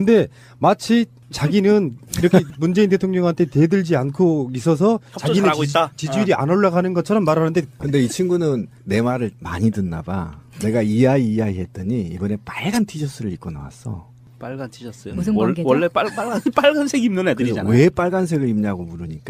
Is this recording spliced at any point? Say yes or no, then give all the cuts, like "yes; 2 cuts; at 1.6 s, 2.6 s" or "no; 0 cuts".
no; 0 cuts